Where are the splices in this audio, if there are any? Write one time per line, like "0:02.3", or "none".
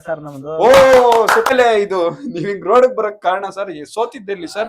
0:01.5